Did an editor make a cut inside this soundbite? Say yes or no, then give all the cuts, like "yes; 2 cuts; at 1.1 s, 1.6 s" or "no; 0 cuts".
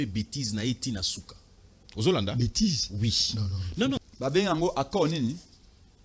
yes; 1 cut; at 4.0 s